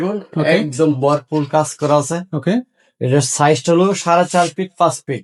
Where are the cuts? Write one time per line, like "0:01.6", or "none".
none